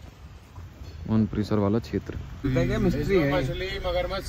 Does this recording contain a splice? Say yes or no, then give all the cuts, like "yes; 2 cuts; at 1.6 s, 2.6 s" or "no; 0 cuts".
yes; 1 cut; at 2.5 s